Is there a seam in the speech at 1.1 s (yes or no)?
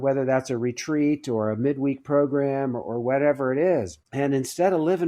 no